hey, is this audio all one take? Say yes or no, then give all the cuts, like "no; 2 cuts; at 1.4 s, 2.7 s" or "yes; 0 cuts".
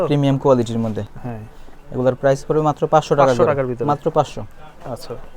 yes; 0 cuts